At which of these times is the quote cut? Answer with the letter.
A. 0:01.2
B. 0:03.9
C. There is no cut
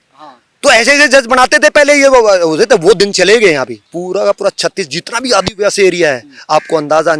B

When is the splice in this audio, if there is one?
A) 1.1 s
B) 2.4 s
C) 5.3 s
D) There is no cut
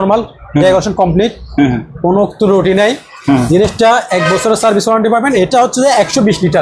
C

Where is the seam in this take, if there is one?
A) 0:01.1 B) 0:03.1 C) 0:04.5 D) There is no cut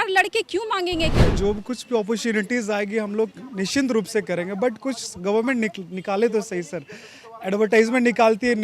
A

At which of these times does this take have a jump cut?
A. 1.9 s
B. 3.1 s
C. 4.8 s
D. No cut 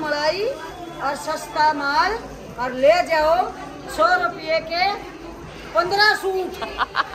D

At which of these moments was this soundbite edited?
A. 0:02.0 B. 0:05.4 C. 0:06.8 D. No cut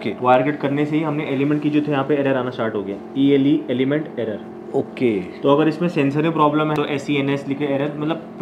C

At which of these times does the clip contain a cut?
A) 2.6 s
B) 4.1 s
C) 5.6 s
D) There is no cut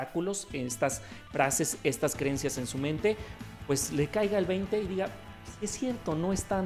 D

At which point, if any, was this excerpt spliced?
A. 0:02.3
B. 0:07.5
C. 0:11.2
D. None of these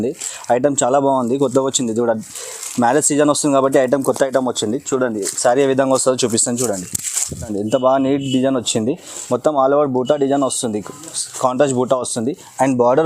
B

